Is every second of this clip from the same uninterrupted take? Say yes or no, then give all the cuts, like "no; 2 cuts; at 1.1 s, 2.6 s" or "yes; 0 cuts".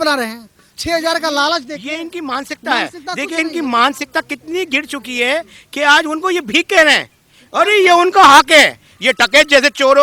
no; 1 cut; at 8.9 s